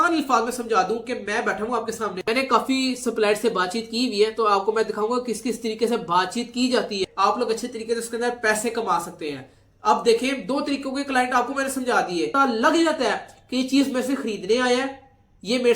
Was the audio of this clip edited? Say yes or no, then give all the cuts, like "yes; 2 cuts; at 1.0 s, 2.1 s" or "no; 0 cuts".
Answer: yes; 3 cuts; at 2.2 s, 7.1 s, 12.3 s